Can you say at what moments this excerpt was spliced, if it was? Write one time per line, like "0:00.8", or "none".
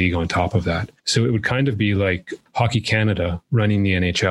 0:00.9
0:03.4